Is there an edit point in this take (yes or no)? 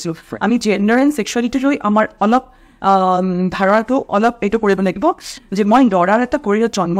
no